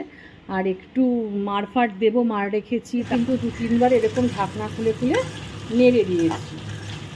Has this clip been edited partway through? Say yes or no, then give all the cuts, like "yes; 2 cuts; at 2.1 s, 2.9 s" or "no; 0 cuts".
yes; 1 cut; at 3.1 s